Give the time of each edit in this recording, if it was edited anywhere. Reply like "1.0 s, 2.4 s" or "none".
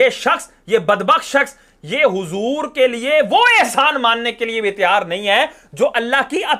none